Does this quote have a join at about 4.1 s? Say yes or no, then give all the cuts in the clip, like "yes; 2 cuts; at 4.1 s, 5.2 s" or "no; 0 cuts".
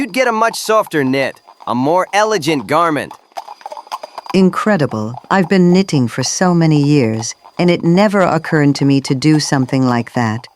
yes; 1 cut; at 4.1 s